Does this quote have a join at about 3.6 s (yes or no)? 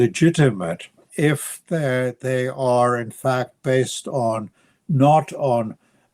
no